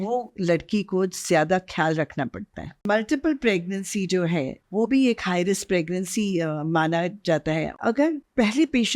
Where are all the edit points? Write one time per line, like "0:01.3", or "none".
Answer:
0:02.8
0:04.6
0:07.9